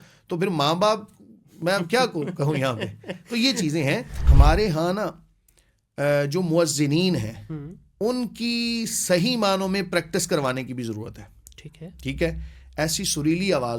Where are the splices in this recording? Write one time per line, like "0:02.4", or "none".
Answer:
0:04.2